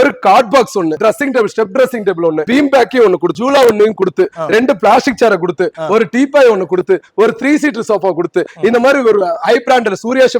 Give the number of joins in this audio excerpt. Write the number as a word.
three